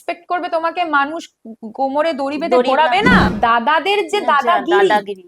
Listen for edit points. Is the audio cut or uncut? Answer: cut